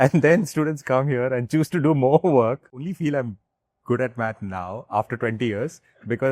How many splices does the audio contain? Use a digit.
1